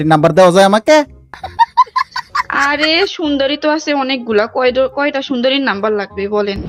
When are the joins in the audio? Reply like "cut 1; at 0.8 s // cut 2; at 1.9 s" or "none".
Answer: none